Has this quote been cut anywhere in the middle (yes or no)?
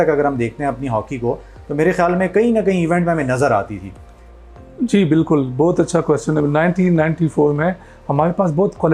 no